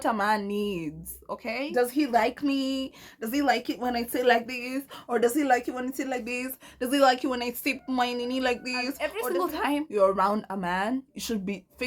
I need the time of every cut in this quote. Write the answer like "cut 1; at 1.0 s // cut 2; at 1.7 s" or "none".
cut 1; at 1.7 s // cut 2; at 9.0 s